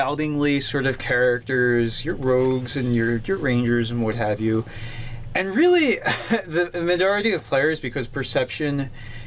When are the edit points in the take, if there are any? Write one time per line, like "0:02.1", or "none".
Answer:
0:01.8